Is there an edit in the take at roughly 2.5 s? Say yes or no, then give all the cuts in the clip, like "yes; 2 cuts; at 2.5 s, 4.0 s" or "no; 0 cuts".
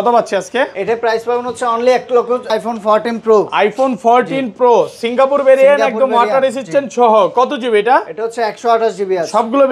yes; 1 cut; at 2.5 s